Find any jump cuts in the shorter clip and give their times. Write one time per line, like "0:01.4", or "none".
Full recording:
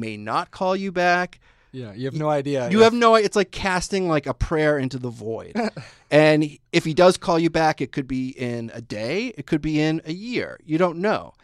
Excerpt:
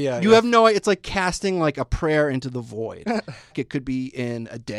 0:03.6